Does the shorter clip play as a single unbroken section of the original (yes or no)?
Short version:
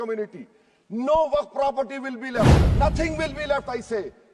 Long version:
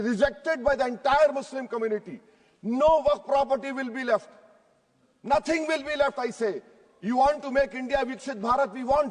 no